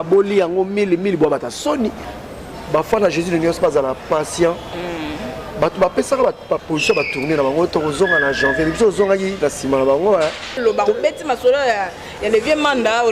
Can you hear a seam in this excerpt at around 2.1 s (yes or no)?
yes